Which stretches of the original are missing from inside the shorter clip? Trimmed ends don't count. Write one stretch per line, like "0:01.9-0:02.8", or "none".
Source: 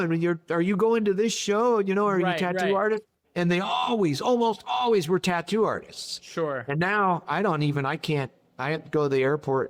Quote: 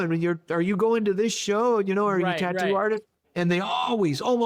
none